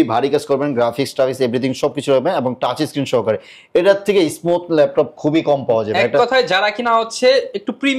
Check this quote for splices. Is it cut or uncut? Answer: uncut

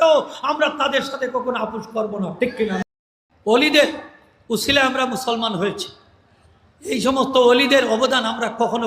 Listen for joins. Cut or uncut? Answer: cut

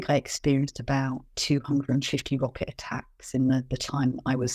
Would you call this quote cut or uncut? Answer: cut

